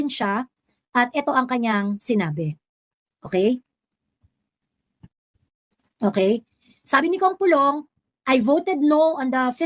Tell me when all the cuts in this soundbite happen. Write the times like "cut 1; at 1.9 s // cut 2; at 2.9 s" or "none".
none